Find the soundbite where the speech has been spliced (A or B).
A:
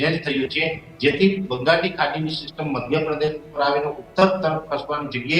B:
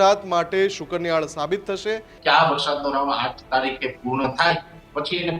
B